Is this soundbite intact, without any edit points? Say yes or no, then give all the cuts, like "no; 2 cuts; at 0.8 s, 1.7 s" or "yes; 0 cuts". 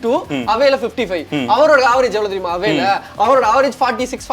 yes; 0 cuts